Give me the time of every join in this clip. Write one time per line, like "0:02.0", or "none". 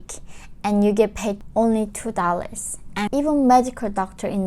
0:01.4
0:03.1